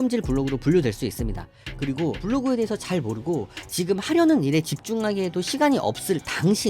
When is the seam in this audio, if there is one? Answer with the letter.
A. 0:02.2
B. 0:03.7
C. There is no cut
A